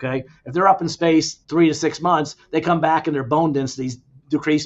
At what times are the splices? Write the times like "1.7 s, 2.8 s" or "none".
1.4 s